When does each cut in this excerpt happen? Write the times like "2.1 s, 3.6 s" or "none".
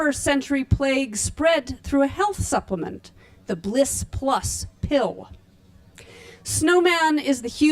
none